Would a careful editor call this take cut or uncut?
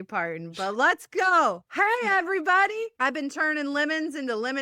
cut